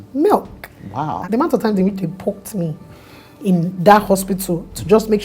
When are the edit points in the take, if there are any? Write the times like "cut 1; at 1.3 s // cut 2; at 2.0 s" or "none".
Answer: cut 1; at 1.2 s